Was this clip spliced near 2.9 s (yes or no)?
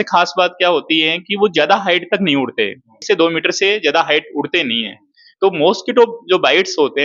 yes